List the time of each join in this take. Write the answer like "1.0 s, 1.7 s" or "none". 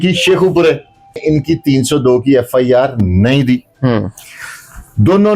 1.2 s